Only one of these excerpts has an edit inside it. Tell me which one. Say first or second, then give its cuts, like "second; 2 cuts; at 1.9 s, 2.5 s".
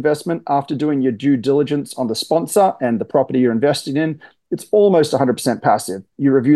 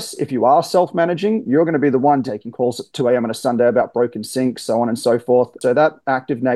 second; 2 cuts; at 2.2 s, 5.6 s